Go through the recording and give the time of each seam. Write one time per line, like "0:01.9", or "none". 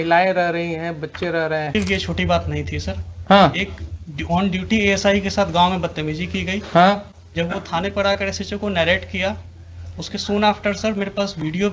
0:01.7